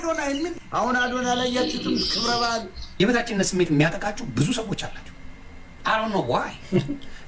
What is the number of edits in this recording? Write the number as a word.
one